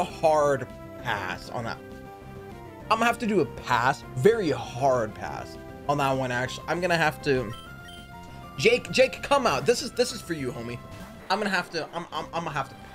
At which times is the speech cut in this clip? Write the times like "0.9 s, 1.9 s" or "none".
none